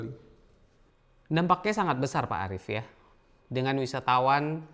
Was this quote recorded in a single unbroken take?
yes; 0 cuts

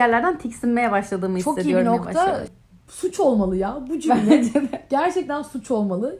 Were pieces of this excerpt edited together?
yes; 1 cut; at 2.6 s

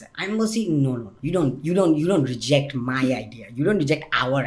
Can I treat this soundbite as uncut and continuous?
no; 1 cut; at 1.1 s

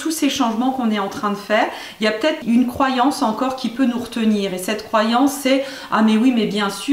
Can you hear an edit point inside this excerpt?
yes; 1 cut; at 2.4 s

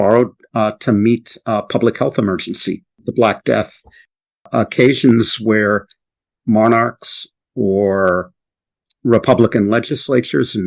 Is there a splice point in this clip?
yes; 2 cuts; at 3.0 s, 4.3 s

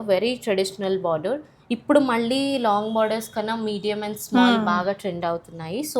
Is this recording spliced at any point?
no; 0 cuts

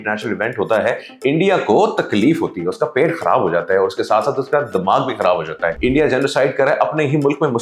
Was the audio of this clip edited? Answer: yes; 1 cut; at 5.7 s

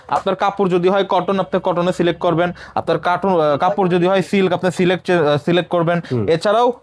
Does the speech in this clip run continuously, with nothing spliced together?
yes; 0 cuts

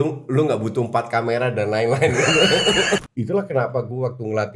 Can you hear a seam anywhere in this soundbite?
yes; 1 cut; at 3.1 s

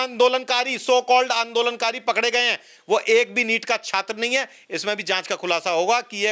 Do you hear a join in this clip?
no; 0 cuts

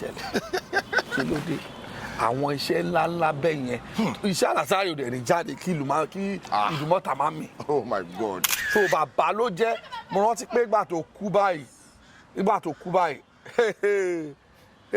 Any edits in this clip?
yes; 1 cut; at 8.5 s

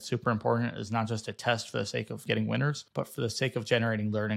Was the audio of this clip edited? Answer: yes; 2 cuts; at 2.3 s, 2.8 s

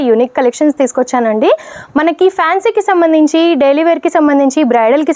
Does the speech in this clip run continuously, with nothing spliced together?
yes; 0 cuts

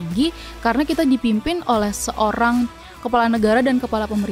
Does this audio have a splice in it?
no; 0 cuts

